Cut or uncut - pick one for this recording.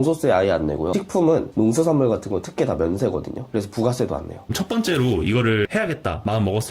cut